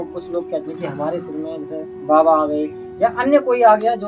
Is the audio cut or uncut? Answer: uncut